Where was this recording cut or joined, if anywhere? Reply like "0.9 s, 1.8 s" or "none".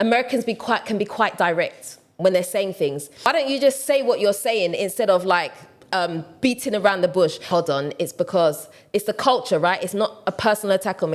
3.3 s, 7.4 s